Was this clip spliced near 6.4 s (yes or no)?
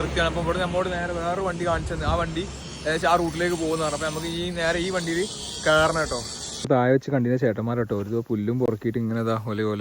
yes